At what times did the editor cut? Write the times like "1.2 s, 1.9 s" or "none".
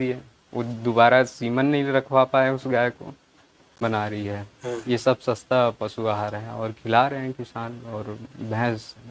3.8 s